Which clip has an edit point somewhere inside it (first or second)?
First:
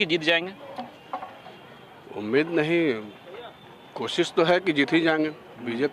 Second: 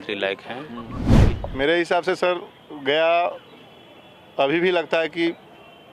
second